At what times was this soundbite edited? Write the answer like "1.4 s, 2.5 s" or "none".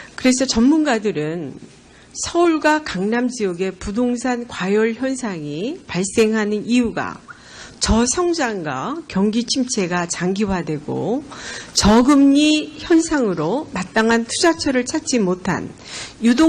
11.4 s